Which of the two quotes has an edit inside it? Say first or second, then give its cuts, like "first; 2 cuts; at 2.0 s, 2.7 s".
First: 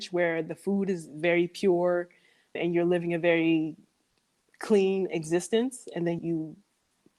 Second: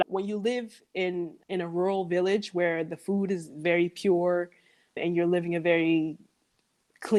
first; 1 cut; at 6.2 s